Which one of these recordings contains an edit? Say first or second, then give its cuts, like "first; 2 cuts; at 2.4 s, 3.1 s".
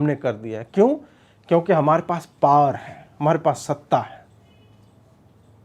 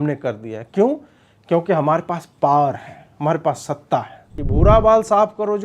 second; 1 cut; at 4.4 s